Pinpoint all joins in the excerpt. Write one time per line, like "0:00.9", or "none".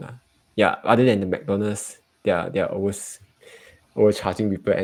none